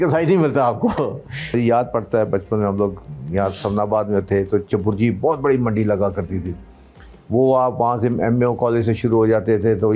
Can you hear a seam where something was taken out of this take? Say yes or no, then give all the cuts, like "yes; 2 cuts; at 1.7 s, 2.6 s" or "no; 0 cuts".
yes; 1 cut; at 1.5 s